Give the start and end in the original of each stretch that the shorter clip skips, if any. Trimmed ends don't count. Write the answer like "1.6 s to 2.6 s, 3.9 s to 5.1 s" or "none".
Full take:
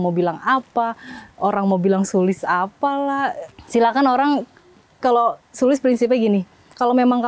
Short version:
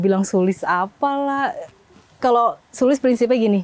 3.6 s to 4.6 s